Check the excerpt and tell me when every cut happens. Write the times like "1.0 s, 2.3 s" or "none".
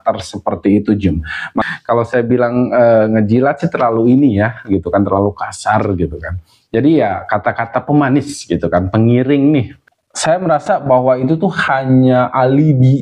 1.6 s, 9.8 s